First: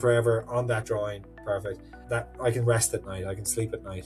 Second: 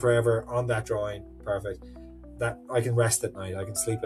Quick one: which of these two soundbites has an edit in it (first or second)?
first